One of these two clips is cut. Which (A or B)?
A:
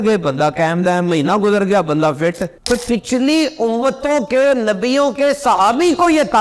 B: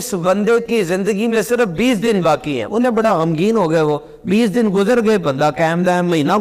A